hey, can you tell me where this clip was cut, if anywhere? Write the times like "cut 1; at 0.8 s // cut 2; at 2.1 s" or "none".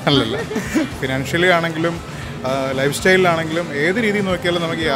cut 1; at 1.0 s